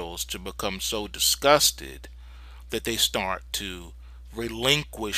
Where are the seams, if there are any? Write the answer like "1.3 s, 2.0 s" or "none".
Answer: 3.4 s

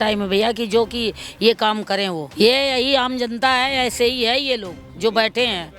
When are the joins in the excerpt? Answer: 2.2 s

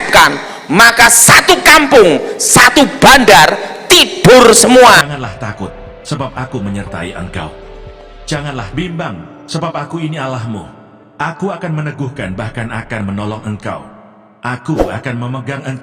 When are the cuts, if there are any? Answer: 5.1 s

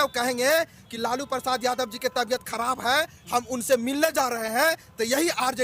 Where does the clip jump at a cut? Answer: none

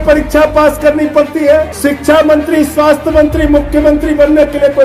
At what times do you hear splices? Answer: 1.7 s

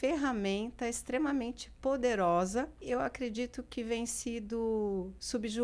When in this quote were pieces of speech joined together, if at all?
2.8 s

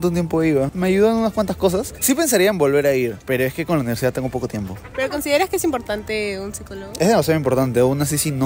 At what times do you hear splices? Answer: none

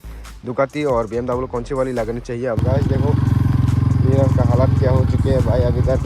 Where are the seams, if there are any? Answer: 2.6 s

